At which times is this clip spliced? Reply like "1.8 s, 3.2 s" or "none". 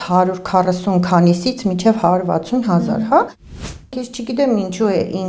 3.7 s